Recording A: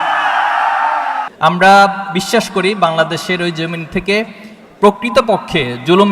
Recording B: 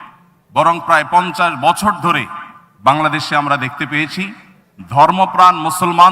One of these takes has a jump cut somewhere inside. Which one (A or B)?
A